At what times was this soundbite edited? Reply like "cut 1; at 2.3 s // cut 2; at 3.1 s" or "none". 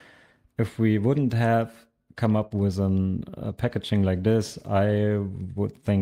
none